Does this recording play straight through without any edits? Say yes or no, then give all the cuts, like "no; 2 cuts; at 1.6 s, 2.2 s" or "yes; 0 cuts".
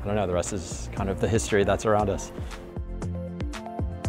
yes; 0 cuts